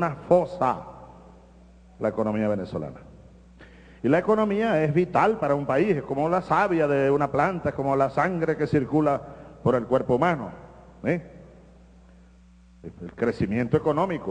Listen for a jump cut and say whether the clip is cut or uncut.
cut